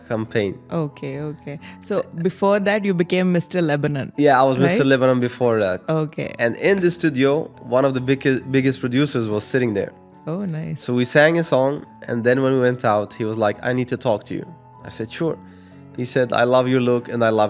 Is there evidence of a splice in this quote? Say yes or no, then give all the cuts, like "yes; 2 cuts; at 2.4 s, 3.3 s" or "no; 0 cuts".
no; 0 cuts